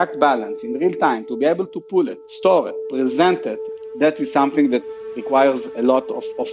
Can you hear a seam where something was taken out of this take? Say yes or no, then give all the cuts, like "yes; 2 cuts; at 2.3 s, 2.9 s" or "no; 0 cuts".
yes; 1 cut; at 3.7 s